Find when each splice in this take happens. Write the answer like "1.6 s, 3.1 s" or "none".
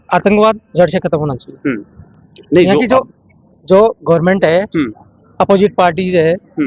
none

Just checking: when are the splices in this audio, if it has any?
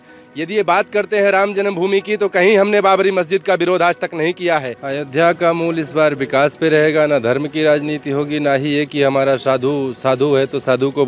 4.8 s

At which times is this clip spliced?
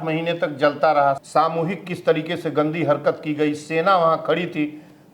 1.2 s

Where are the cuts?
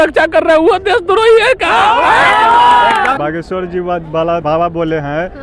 3.2 s, 4.4 s

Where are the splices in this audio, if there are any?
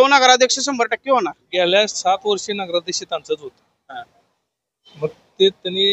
1.4 s

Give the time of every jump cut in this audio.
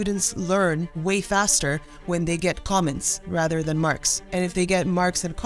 0.9 s, 4.1 s

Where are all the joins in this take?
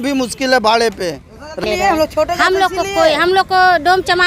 1.6 s

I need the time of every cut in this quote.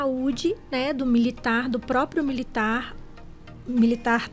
none

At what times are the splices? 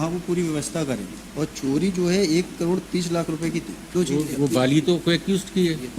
1.2 s, 3.8 s

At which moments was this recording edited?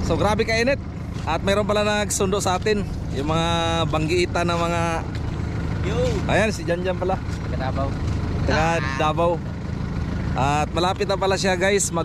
none

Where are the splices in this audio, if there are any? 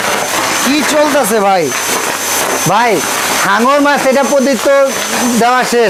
none

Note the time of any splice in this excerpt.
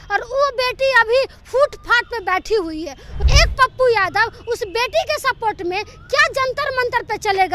3.1 s

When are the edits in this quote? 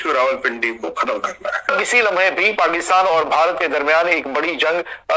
1.7 s

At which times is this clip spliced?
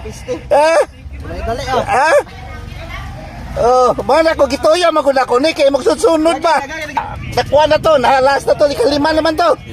7.1 s

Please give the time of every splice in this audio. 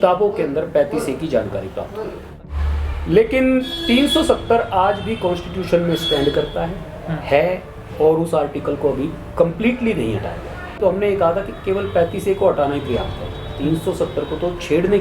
2.2 s, 10.7 s

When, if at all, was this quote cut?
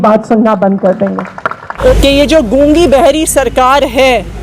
1.9 s

